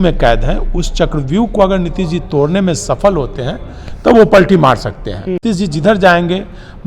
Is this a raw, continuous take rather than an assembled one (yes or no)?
no